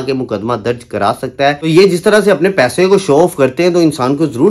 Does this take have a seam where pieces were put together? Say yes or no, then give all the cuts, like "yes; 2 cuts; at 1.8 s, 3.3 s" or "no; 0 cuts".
yes; 1 cut; at 1.6 s